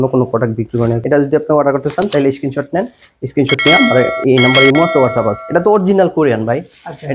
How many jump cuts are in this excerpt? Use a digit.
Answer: 2